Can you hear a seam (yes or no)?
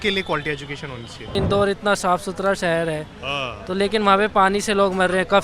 yes